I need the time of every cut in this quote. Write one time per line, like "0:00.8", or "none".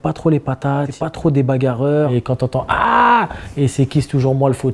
0:00.9
0:02.2